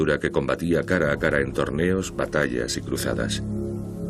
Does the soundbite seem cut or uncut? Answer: cut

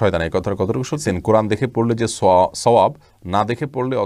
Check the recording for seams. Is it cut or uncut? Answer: cut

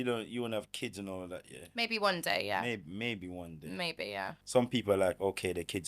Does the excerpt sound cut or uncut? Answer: cut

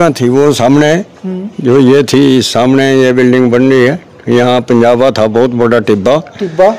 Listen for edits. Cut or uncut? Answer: uncut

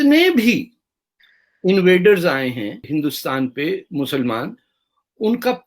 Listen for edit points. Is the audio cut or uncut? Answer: cut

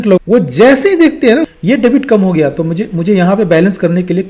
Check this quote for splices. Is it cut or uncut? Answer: cut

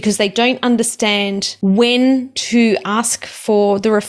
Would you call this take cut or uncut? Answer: cut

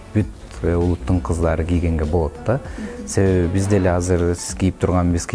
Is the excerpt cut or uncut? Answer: uncut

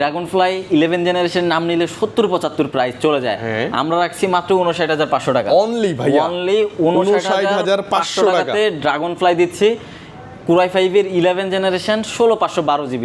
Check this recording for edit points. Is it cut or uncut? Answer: uncut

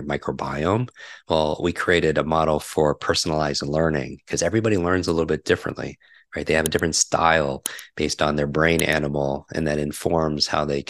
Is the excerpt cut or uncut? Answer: uncut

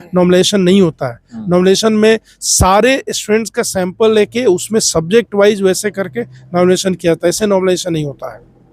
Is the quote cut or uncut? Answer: uncut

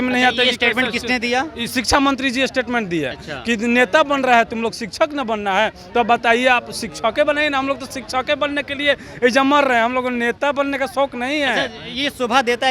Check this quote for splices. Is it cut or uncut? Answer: uncut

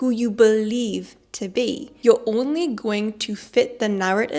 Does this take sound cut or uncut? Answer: cut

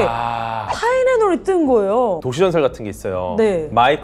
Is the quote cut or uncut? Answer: cut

